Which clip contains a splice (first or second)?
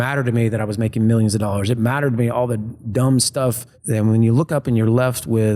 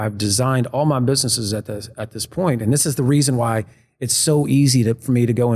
first